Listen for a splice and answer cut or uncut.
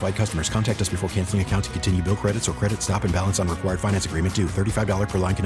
uncut